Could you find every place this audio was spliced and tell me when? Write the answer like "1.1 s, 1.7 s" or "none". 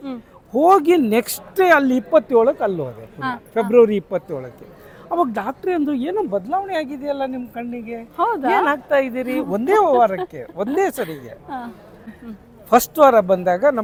none